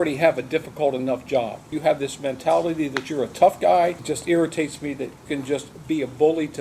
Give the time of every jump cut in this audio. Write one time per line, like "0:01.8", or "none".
0:01.7
0:04.0
0:05.2

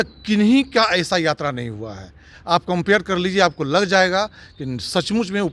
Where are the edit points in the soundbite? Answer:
none

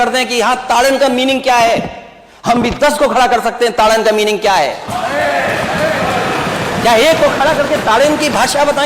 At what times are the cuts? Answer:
none

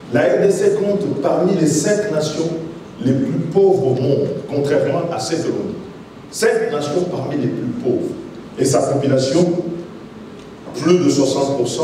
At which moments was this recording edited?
none

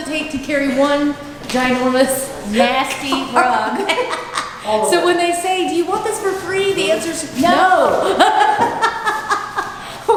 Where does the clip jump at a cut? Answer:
none

